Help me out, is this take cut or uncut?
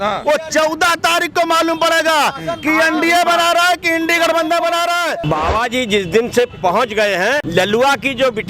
cut